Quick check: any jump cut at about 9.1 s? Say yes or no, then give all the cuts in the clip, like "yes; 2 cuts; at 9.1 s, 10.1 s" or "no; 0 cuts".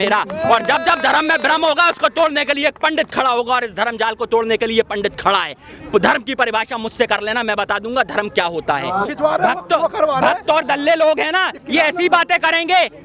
yes; 1 cut; at 9.1 s